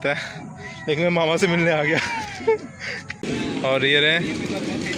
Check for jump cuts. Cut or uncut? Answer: cut